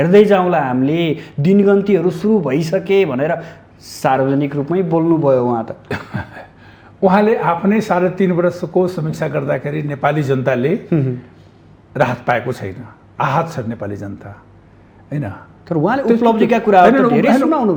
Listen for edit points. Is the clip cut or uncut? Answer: uncut